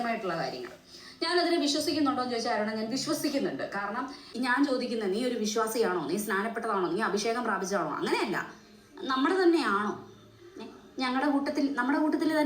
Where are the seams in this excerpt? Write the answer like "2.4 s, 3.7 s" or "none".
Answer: 4.3 s